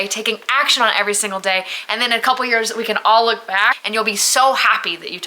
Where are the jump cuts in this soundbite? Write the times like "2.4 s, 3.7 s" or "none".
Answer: 3.8 s